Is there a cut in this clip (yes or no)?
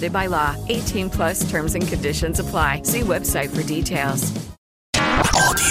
yes